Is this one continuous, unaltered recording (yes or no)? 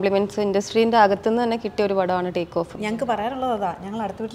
no